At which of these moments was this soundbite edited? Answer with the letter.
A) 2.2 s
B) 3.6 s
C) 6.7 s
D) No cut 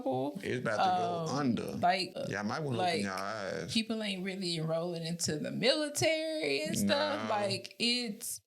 A